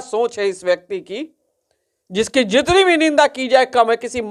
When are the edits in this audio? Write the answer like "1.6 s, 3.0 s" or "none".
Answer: none